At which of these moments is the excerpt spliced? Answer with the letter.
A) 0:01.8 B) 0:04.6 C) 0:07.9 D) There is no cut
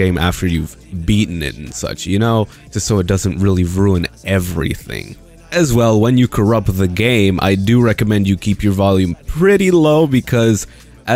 C